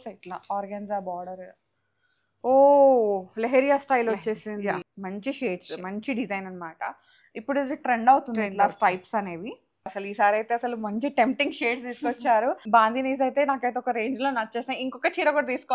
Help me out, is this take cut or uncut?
cut